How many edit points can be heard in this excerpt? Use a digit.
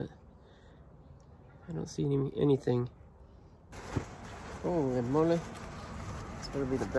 1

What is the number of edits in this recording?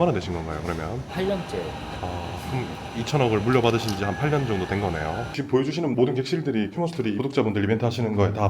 2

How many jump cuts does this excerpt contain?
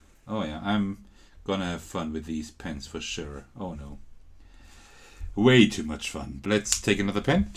1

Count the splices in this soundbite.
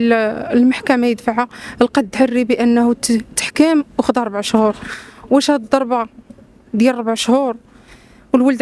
0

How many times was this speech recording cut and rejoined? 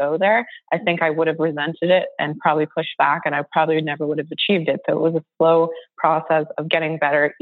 0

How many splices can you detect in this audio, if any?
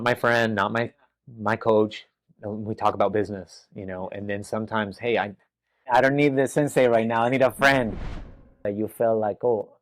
1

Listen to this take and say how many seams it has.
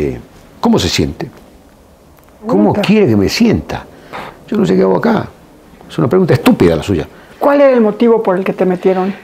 2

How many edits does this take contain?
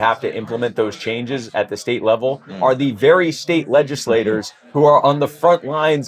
0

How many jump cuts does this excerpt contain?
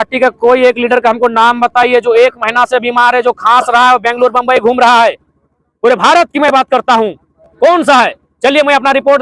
0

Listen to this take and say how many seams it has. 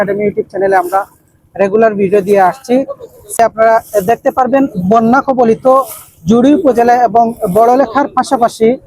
1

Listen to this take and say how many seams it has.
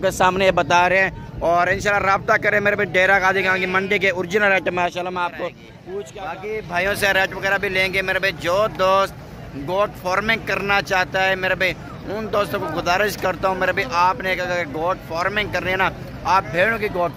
1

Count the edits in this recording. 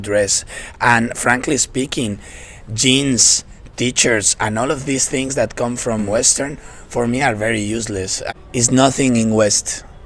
2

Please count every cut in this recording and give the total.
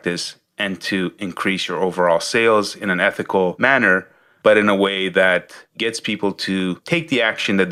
0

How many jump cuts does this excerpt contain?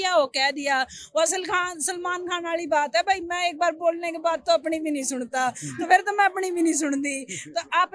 0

